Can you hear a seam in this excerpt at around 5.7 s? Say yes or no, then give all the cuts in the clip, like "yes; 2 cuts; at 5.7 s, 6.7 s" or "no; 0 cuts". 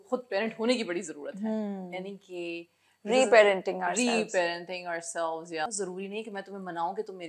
yes; 1 cut; at 5.7 s